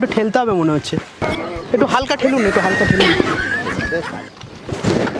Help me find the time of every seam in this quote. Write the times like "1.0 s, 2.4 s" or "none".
1.2 s